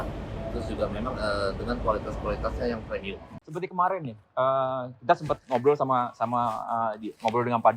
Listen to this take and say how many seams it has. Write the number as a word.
one